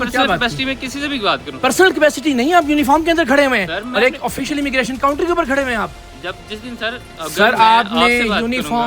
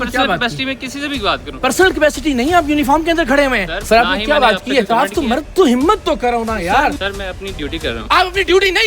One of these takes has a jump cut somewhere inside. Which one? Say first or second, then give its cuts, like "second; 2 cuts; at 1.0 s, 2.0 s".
second; 2 cuts; at 3.7 s, 7.0 s